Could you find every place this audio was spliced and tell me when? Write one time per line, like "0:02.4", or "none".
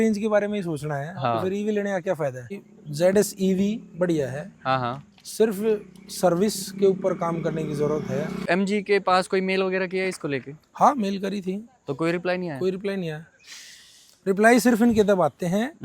0:02.5
0:08.5